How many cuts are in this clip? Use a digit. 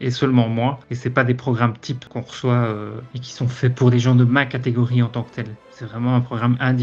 2